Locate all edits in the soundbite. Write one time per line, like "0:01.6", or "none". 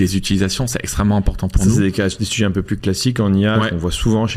none